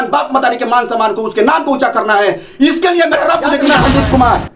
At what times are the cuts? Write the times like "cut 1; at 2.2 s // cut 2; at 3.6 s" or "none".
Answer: cut 1; at 3.6 s